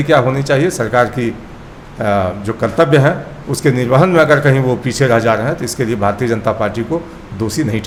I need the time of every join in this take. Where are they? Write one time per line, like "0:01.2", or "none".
none